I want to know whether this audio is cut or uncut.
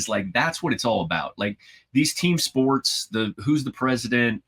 uncut